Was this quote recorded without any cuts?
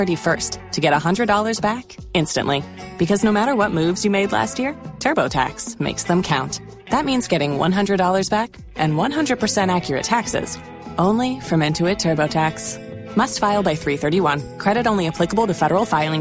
yes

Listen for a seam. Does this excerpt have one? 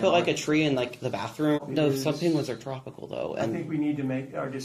yes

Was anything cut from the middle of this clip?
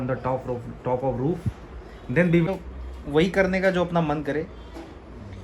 yes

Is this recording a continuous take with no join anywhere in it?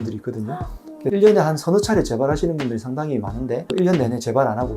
no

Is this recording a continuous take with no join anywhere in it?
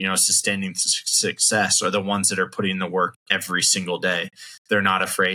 yes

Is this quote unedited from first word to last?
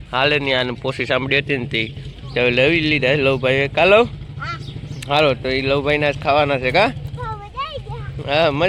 yes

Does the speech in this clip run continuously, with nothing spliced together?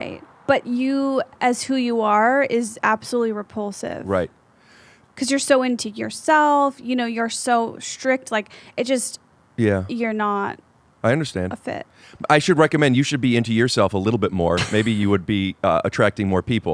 no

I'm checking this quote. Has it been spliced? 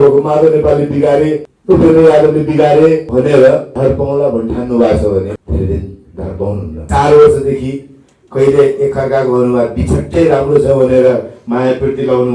yes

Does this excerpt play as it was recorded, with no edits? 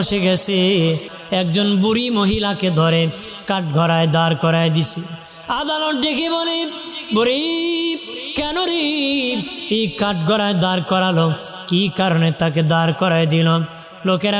no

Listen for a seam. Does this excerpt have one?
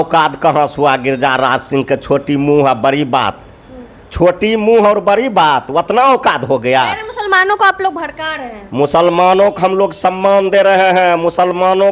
no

